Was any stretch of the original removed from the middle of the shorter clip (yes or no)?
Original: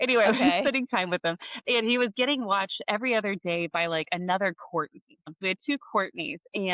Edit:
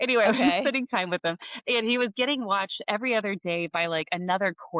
no